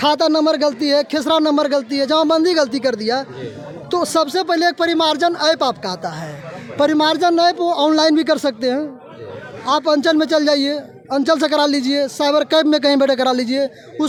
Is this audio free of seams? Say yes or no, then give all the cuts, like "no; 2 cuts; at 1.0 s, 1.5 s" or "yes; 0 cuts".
yes; 0 cuts